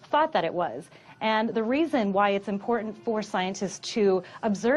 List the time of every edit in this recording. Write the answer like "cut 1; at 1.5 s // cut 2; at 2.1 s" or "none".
none